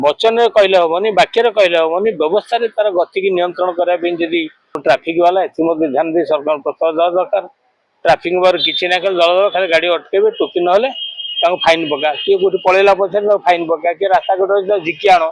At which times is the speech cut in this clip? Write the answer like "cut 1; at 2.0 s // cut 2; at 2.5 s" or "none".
cut 1; at 4.8 s